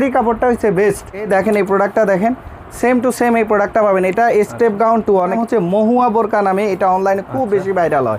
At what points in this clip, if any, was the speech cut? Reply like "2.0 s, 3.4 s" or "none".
1.3 s, 5.3 s

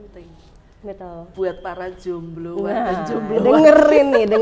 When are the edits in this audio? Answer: 1.3 s

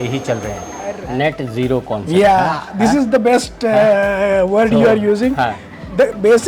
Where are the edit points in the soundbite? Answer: 1.0 s

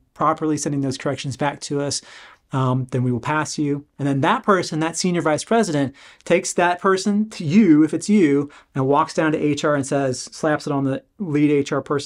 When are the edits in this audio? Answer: 3.9 s

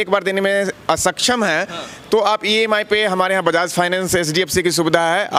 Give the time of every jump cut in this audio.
none

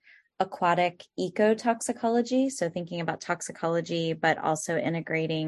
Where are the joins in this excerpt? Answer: none

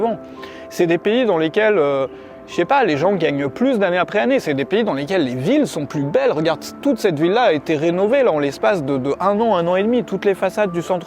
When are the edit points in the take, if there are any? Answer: none

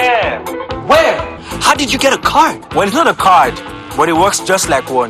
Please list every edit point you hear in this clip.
1.5 s

